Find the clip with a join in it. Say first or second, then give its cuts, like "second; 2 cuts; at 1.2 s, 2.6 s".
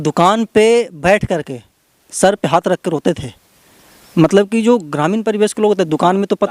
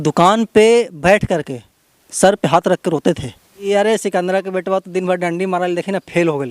second; 1 cut; at 3.6 s